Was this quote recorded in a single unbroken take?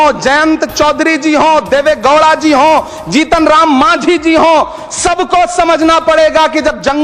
yes; 0 cuts

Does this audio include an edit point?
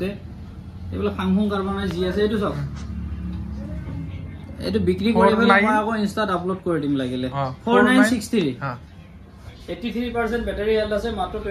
no; 0 cuts

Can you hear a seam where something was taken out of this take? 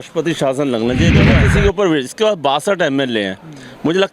yes; 1 cut; at 1.3 s

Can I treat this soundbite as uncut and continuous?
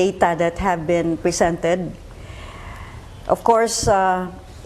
no; 1 cut; at 3.3 s

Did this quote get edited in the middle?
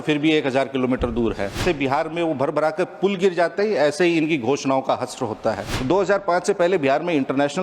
yes; 2 cuts; at 1.6 s, 5.7 s

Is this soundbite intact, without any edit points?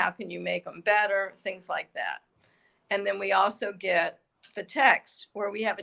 yes; 0 cuts

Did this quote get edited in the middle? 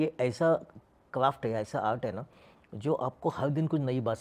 no; 0 cuts

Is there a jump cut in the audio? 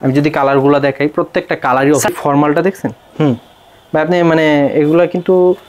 yes; 1 cut; at 2.1 s

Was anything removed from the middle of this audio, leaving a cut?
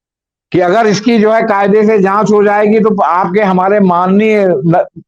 no; 0 cuts

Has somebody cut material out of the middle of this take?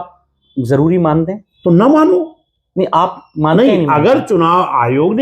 yes; 1 cut; at 1.5 s

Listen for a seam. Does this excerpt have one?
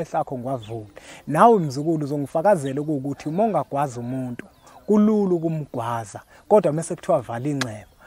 no; 0 cuts

